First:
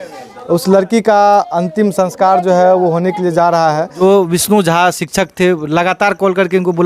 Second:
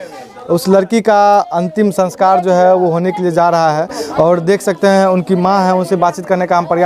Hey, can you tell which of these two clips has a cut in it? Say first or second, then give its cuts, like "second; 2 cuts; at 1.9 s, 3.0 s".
first; 1 cut; at 4.0 s